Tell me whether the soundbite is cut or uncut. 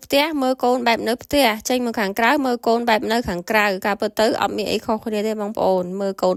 uncut